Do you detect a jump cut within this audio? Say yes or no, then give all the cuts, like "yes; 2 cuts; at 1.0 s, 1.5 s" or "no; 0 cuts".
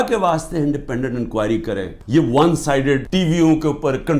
yes; 2 cuts; at 1.9 s, 3.1 s